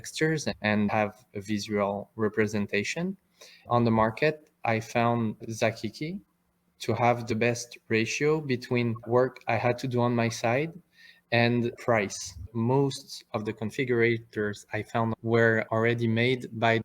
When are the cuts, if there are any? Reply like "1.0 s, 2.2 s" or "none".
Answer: 0.9 s, 3.6 s, 12.4 s, 15.1 s